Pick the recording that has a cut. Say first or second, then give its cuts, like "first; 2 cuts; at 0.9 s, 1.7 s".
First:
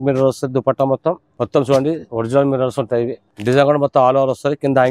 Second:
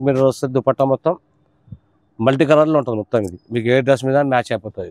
first; 2 cuts; at 1.3 s, 3.3 s